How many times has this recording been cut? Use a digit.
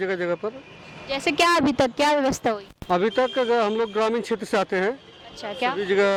0